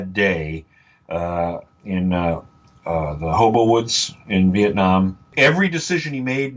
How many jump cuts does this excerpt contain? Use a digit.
1